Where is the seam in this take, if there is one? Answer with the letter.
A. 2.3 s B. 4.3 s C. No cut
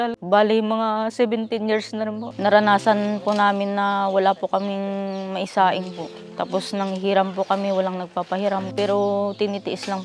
A